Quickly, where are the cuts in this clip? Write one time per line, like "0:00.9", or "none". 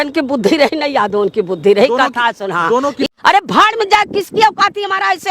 0:03.1